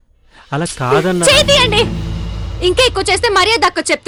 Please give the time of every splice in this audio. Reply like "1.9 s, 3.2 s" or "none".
none